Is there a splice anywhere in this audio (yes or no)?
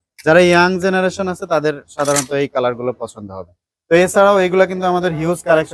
no